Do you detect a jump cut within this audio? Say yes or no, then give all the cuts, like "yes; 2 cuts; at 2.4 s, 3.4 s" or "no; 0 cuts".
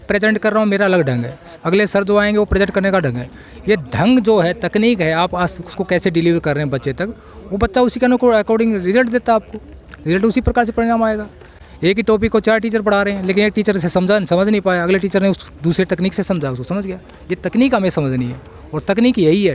no; 0 cuts